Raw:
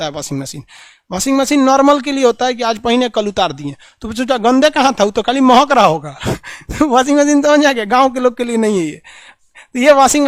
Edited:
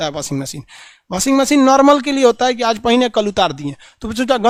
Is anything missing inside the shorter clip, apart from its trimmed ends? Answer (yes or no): no